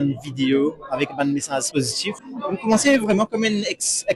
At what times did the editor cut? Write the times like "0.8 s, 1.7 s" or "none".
1.7 s

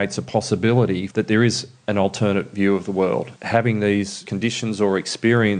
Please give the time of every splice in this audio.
1.1 s, 3.4 s, 4.2 s

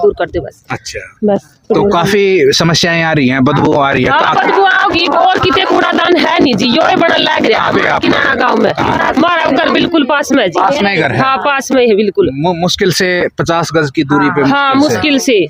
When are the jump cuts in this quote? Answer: none

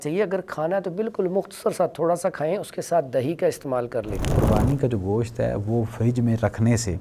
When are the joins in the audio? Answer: 4.3 s

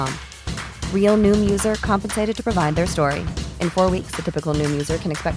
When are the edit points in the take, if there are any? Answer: none

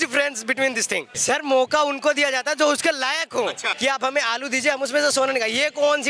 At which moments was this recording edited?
1.1 s, 3.7 s

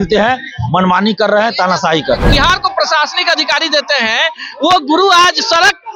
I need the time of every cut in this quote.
2.3 s

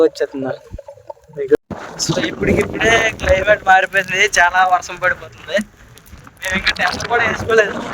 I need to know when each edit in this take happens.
1.6 s

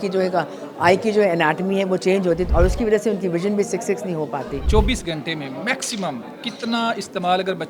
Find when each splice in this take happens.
2.4 s, 4.6 s

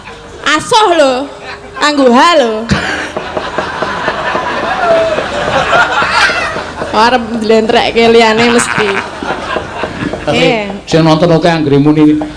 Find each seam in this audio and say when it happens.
10.4 s

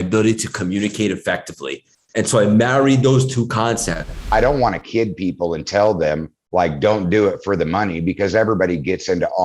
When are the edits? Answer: 4.2 s

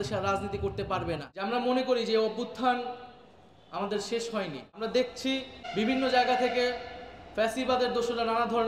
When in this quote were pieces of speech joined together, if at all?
1.3 s, 4.7 s, 5.6 s

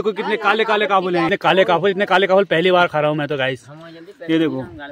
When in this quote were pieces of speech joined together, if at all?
1.3 s

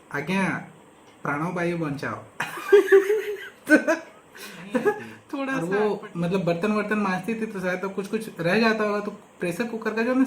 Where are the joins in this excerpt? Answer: 5.5 s

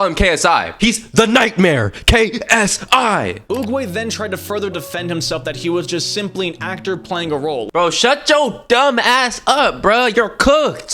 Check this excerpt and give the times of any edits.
3.4 s, 7.7 s

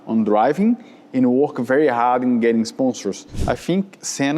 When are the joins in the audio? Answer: 3.3 s

